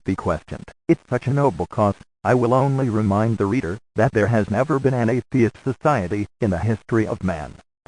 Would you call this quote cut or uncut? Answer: cut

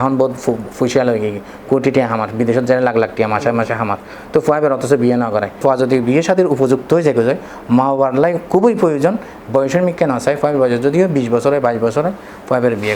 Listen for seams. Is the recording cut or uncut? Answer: cut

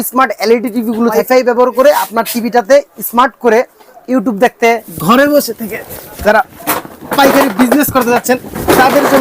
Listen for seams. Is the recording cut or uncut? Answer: cut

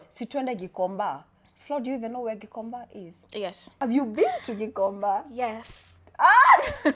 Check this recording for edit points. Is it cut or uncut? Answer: uncut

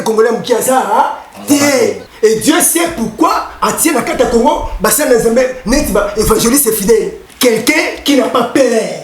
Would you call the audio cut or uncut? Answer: cut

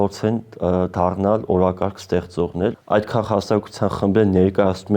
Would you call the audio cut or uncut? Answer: cut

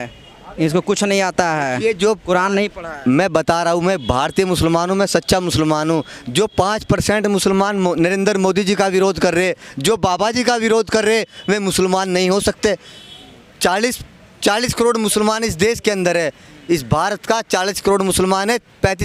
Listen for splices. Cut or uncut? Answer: uncut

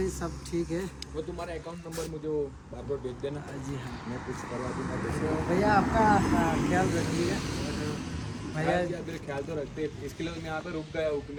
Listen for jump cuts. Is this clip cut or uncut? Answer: uncut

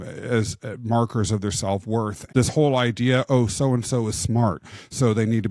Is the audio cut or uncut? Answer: cut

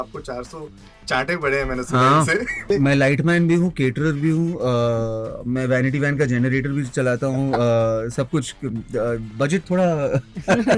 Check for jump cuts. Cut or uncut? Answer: cut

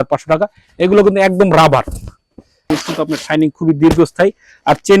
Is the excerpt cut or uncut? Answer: cut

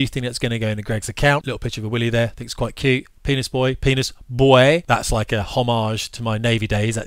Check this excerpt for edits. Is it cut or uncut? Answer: cut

